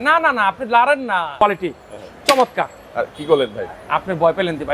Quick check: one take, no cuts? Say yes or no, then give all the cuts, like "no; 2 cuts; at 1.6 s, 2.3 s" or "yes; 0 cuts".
no; 1 cut; at 1.4 s